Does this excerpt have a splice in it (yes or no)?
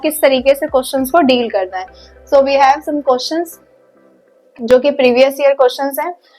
no